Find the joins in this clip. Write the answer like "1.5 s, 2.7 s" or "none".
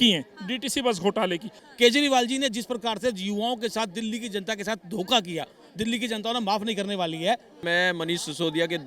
1.6 s, 7.6 s